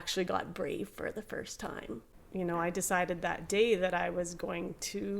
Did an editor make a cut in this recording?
yes; 1 cut; at 2.1 s

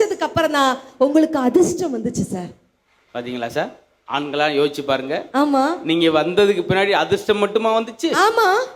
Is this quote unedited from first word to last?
yes; 0 cuts

